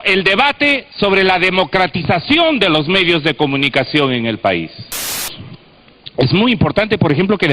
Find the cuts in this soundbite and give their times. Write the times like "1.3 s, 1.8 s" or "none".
5.3 s